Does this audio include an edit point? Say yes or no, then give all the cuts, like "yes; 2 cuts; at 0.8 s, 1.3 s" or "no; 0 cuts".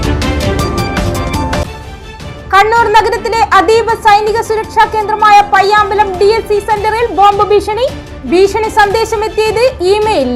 no; 0 cuts